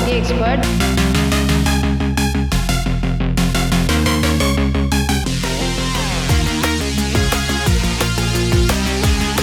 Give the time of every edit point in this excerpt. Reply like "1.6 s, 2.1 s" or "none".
none